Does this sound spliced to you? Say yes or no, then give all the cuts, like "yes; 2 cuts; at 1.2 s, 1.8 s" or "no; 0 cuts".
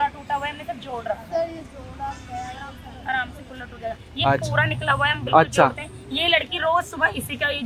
no; 0 cuts